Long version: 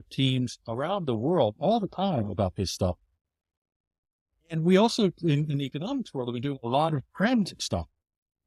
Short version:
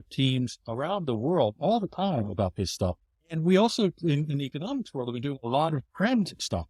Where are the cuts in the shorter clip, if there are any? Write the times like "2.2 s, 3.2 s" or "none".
3.1 s